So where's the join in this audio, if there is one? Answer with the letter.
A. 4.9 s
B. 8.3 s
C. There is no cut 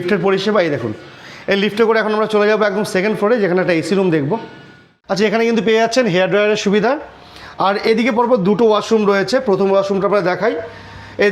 A